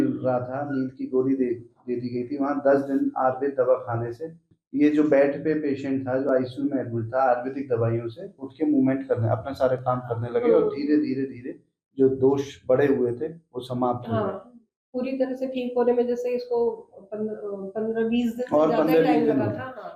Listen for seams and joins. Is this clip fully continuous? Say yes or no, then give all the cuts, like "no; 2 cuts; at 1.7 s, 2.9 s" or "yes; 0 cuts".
yes; 0 cuts